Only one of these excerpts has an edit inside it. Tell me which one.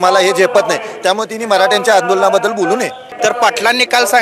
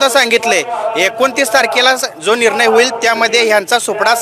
first; 1 cut; at 3.0 s

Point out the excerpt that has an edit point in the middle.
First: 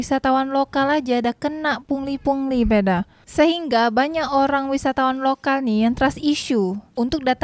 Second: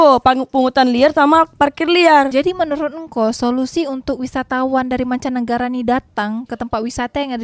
second; 1 cut; at 2.3 s

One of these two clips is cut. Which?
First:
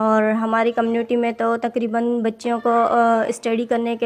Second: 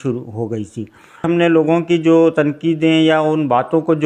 second; 1 cut; at 1.2 s

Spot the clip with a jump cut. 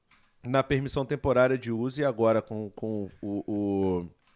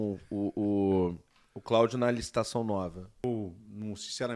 second; 1 cut; at 3.2 s

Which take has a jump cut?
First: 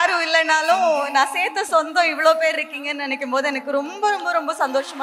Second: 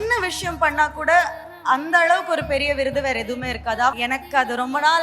second; 1 cut; at 3.9 s

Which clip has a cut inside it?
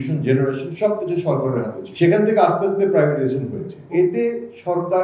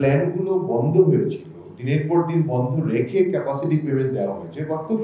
first; 2 cuts; at 1.8 s, 3.9 s

